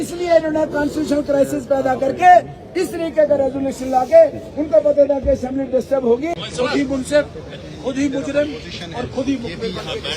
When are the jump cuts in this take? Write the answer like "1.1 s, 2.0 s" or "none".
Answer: 6.3 s